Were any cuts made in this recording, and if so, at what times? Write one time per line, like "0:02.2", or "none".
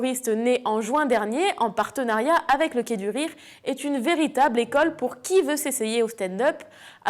0:02.6